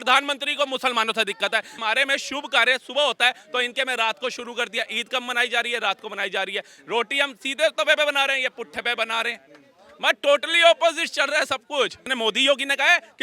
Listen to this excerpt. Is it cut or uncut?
cut